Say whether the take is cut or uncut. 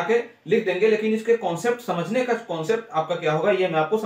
uncut